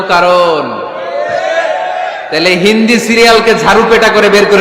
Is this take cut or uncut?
uncut